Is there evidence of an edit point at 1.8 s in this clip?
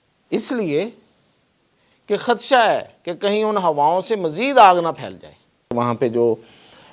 no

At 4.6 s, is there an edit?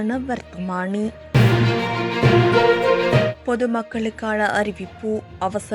no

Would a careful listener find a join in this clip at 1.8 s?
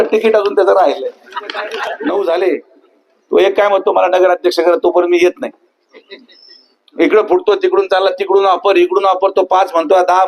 yes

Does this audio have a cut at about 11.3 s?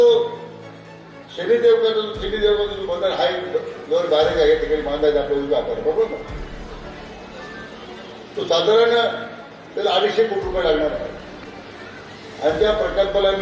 no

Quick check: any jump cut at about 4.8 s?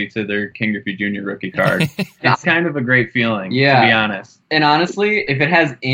no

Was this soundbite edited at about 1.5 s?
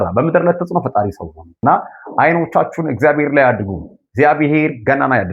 yes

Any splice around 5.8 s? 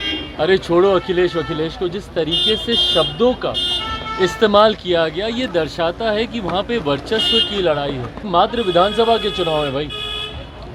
no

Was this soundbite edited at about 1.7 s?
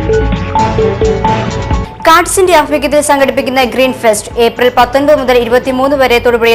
yes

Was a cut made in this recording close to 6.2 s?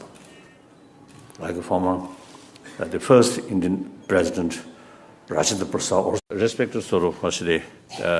no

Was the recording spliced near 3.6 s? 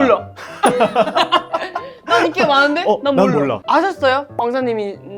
yes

